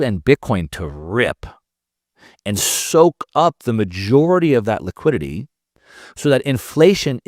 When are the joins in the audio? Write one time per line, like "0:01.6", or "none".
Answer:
none